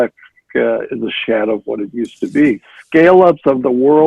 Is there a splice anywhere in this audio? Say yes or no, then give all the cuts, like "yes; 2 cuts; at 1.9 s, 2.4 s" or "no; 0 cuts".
yes; 1 cut; at 2.7 s